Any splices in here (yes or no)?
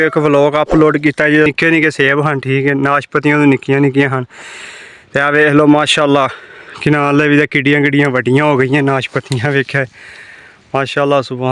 yes